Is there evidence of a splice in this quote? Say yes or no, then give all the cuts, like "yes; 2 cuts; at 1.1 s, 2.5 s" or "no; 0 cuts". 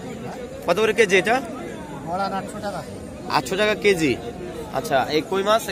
no; 0 cuts